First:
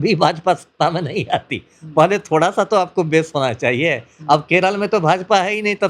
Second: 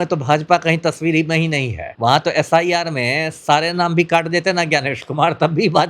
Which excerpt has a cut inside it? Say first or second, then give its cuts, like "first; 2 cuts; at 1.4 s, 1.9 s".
second; 1 cut; at 1.8 s